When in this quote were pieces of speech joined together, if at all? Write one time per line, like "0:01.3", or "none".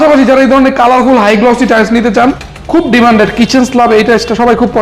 0:02.5